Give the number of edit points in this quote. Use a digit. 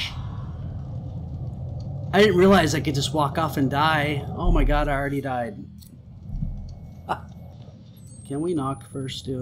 1